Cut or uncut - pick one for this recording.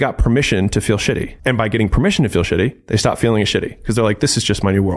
cut